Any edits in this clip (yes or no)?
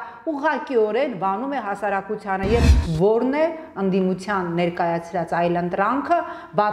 yes